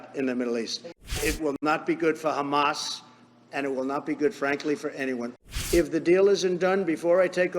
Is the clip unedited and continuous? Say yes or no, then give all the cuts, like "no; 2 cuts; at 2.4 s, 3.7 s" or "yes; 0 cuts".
no; 2 cuts; at 1.2 s, 5.3 s